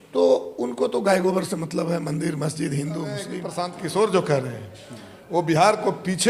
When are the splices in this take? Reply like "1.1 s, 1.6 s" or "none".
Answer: 3.4 s